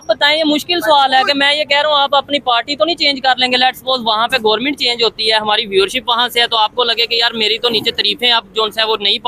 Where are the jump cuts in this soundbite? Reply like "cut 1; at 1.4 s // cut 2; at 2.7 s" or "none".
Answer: none